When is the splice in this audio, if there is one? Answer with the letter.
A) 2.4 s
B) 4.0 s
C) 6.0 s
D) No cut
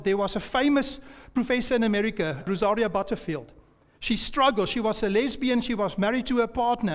A